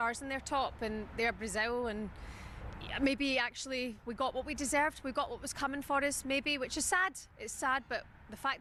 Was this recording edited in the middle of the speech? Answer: no; 0 cuts

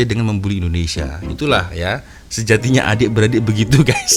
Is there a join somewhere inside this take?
no; 0 cuts

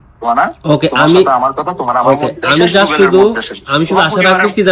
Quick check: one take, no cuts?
yes; 0 cuts

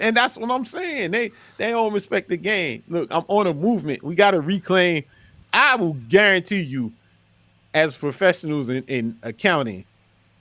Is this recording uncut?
no; 1 cut; at 5.4 s

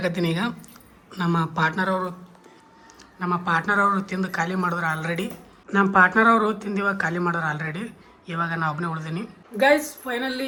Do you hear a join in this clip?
no; 0 cuts

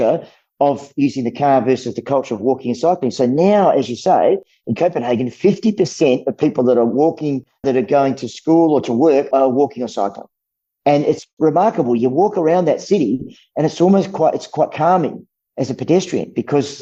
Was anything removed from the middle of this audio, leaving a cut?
no; 0 cuts

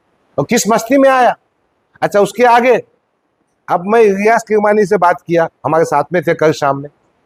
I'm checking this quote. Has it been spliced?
no; 0 cuts

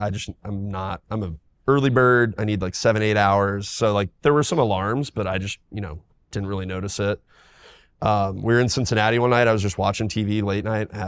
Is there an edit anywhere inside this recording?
no; 0 cuts

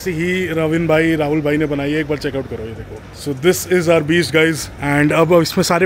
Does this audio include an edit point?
no; 0 cuts

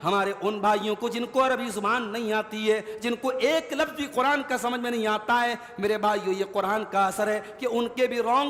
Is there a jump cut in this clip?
no; 0 cuts

